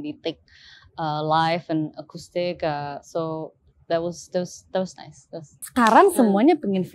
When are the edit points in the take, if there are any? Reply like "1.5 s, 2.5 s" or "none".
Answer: 5.6 s